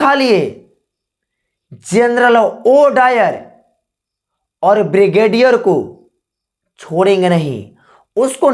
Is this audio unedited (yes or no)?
yes